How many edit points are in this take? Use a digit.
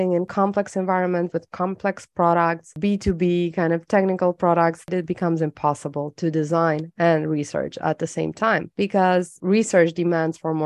2